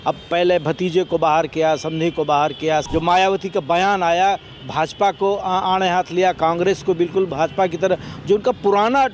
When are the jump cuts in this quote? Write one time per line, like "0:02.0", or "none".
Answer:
0:02.8